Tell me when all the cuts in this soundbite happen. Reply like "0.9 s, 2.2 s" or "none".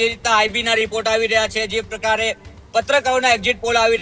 none